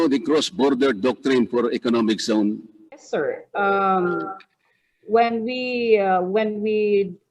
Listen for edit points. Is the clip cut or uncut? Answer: cut